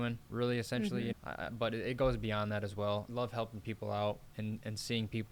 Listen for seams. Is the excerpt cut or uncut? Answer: cut